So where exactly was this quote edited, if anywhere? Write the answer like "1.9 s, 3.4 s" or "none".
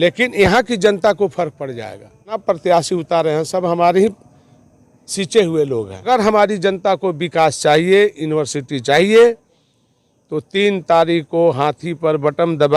2.4 s, 6.0 s